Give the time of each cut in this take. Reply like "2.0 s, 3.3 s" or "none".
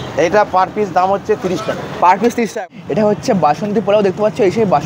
2.5 s

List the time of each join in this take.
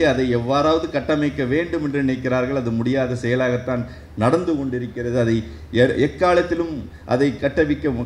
none

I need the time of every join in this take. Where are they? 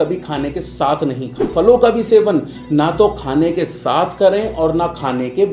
1.5 s

